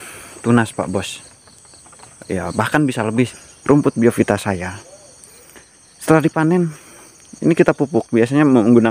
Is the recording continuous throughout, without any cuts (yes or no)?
no